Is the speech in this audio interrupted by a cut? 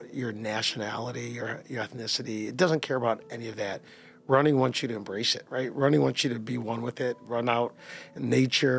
no; 0 cuts

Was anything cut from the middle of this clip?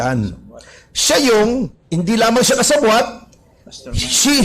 yes; 1 cut; at 1.8 s

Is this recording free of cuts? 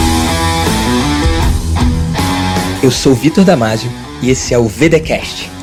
yes; 0 cuts

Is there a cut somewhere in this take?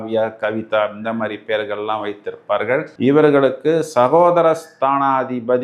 yes; 1 cut; at 2.9 s

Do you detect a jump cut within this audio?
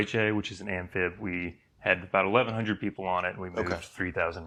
no; 0 cuts

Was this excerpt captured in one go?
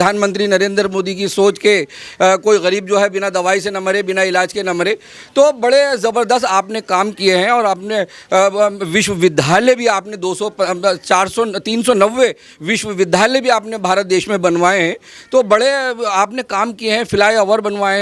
yes; 0 cuts

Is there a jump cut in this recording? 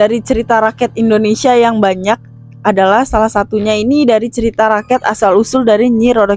no; 0 cuts

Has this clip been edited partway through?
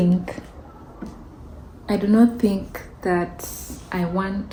no; 0 cuts

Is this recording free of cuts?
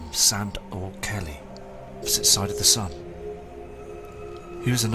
yes; 0 cuts

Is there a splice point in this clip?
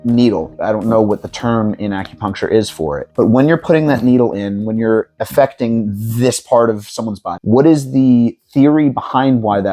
yes; 1 cut; at 7.3 s

